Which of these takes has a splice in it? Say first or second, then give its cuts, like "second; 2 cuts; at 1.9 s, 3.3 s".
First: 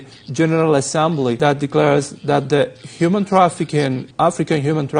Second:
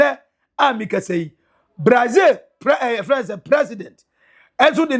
first; 2 cuts; at 1.4 s, 4.1 s